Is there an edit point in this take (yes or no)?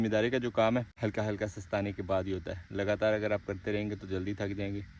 yes